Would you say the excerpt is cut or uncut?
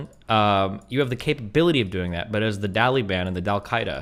uncut